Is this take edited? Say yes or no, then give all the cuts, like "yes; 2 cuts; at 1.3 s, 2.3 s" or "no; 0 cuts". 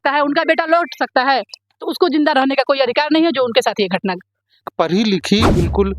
yes; 1 cut; at 4.7 s